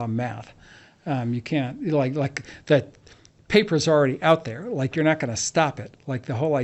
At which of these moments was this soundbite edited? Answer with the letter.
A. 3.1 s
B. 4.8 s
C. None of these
C